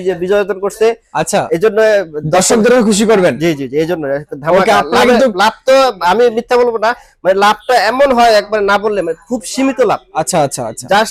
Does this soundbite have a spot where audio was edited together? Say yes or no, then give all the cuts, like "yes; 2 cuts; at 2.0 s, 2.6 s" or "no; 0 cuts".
no; 0 cuts